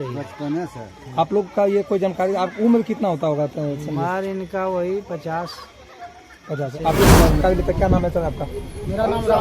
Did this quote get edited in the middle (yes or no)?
yes